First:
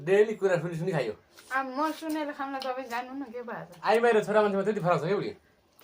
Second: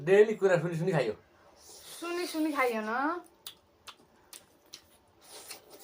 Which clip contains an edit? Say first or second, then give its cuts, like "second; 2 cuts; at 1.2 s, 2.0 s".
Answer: first; 2 cuts; at 1.3 s, 3.7 s